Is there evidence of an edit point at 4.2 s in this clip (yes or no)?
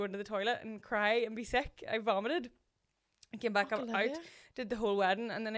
no